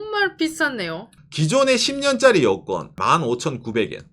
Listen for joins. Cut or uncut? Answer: cut